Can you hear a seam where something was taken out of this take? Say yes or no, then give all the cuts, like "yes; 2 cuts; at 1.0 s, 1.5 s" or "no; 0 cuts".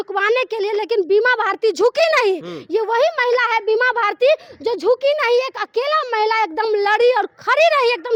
no; 0 cuts